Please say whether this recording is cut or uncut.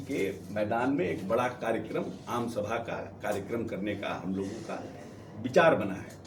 uncut